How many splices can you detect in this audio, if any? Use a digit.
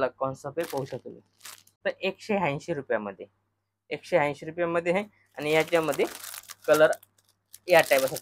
1